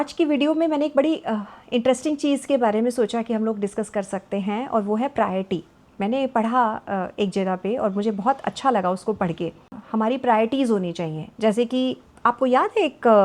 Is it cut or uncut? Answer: cut